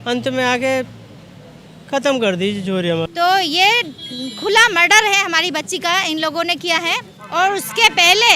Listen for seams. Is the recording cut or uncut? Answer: cut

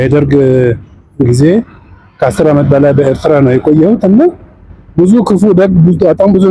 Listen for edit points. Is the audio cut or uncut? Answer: uncut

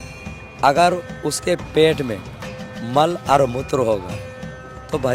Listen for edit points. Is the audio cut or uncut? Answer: uncut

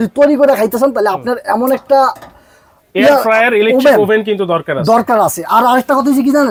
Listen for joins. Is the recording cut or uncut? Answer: uncut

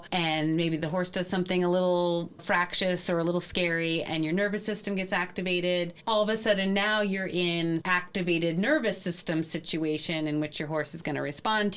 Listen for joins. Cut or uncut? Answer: cut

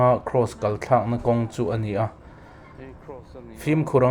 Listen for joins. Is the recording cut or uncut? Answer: uncut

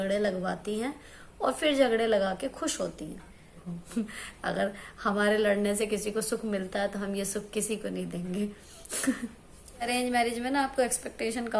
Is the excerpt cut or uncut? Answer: cut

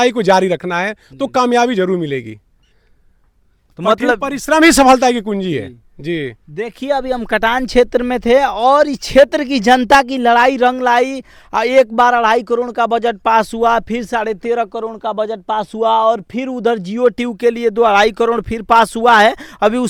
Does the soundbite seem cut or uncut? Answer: uncut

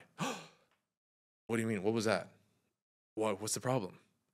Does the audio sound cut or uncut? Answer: uncut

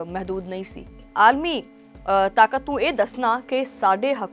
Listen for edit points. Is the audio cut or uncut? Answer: cut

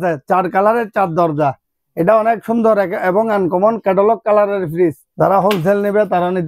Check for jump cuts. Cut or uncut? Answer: cut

